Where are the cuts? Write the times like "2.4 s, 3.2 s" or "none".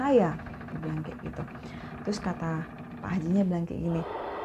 none